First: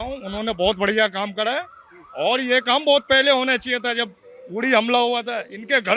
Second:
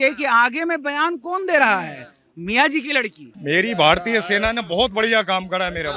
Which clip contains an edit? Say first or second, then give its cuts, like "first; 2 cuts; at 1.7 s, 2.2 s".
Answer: second; 1 cut; at 3.2 s